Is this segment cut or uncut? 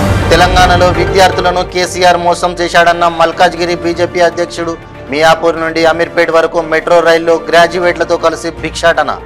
uncut